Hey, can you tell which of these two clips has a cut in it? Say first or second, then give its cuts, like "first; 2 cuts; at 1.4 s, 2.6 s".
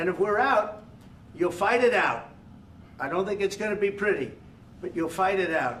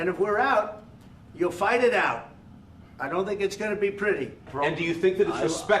second; 1 cut; at 4.5 s